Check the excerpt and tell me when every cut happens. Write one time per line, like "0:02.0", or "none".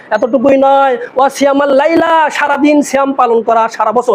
none